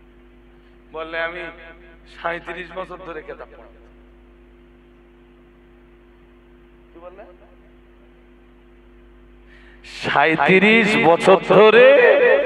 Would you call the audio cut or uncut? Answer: uncut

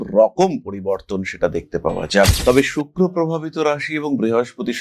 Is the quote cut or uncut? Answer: cut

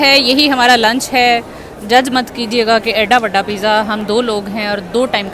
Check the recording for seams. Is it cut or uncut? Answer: uncut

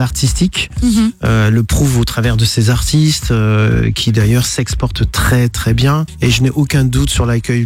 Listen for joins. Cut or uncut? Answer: cut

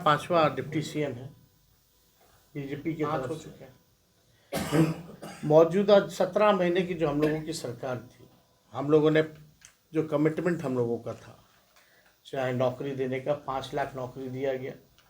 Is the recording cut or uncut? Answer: cut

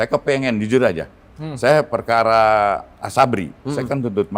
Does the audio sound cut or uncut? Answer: uncut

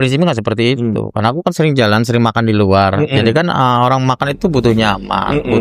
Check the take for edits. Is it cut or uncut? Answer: uncut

